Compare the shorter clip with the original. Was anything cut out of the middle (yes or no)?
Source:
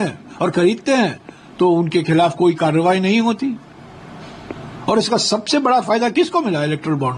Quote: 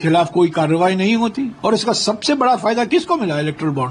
yes